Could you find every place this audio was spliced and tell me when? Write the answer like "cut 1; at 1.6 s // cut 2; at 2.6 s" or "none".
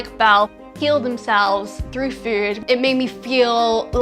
cut 1; at 2.6 s